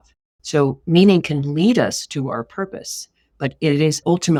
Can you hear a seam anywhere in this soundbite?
no; 0 cuts

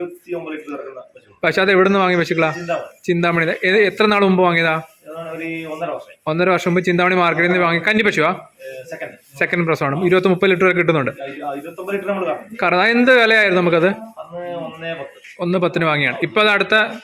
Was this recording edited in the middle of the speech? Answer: no; 0 cuts

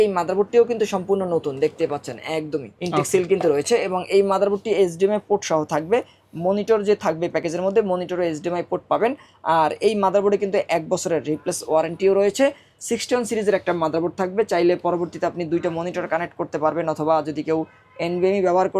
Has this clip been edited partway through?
no; 0 cuts

